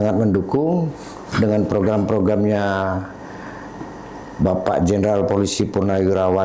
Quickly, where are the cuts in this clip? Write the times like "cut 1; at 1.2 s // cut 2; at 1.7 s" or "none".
none